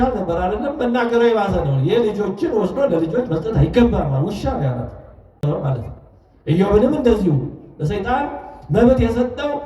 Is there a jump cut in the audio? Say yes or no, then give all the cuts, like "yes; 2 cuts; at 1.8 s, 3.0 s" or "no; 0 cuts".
yes; 1 cut; at 5.4 s